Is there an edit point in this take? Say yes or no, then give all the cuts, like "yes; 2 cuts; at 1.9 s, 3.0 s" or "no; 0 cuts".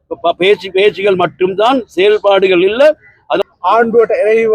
yes; 1 cut; at 3.4 s